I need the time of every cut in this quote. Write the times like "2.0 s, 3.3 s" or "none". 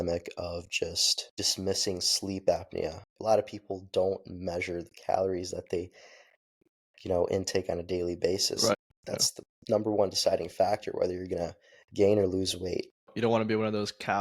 3.1 s, 13.1 s